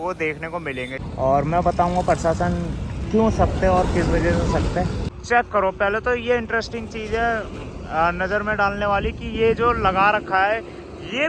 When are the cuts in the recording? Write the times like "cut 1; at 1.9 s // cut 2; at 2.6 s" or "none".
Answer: cut 1; at 1.0 s // cut 2; at 5.1 s

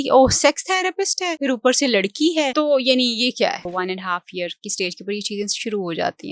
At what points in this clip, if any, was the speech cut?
cut 1; at 1.3 s // cut 2; at 2.5 s // cut 3; at 3.6 s

